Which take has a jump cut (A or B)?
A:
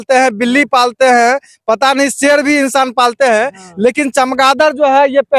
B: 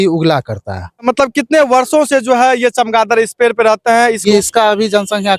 B